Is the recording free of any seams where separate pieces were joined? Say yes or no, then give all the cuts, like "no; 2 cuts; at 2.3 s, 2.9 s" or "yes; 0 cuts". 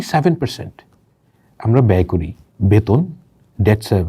no; 1 cut; at 2.4 s